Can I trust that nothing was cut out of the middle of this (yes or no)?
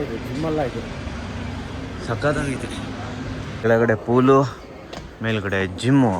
yes